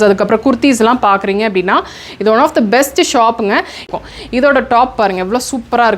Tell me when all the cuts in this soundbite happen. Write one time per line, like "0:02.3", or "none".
0:03.9